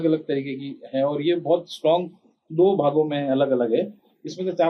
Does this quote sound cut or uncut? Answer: uncut